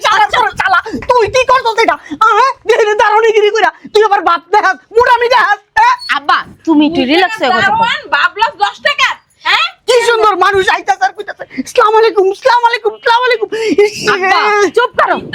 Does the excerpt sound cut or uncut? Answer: uncut